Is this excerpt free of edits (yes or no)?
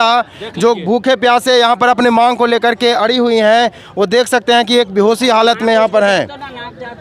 yes